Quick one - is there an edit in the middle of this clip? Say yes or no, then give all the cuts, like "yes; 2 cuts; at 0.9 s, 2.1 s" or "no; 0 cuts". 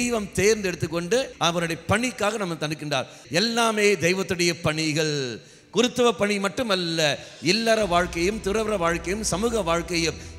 yes; 2 cuts; at 1.3 s, 3.2 s